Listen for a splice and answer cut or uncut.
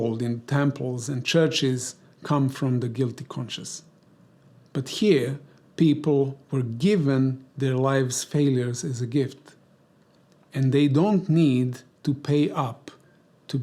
uncut